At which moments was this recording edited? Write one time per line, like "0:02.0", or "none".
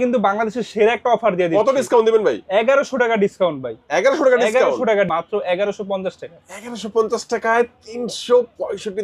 0:05.1